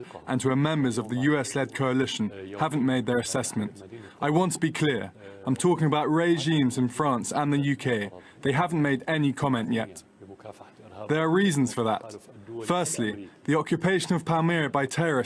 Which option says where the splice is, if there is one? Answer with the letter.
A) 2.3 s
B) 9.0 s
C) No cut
A